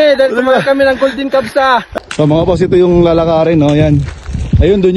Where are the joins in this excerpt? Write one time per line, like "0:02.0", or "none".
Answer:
0:01.9